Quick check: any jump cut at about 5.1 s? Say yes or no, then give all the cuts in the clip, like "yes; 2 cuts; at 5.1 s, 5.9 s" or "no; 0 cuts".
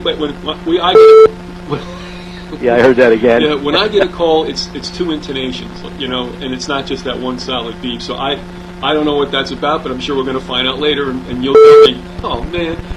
no; 0 cuts